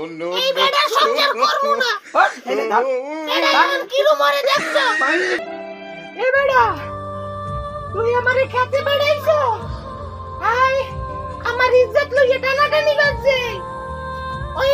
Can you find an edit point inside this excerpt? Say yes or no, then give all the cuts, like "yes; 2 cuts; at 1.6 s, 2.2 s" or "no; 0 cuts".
yes; 1 cut; at 5.4 s